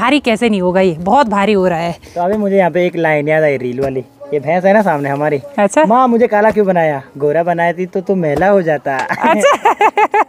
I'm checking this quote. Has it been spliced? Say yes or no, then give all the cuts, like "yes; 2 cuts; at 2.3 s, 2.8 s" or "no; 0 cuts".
no; 0 cuts